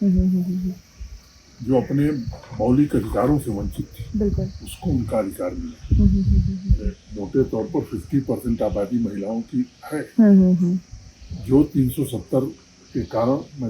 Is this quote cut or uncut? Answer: uncut